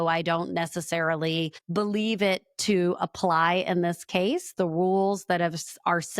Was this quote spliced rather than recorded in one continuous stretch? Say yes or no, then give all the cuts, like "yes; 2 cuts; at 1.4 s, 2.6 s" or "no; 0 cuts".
no; 0 cuts